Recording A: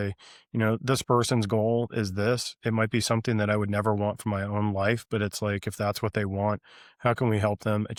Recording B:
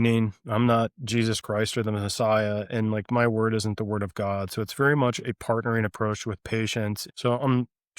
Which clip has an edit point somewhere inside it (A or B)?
B